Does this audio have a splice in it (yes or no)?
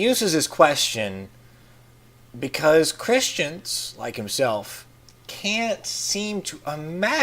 yes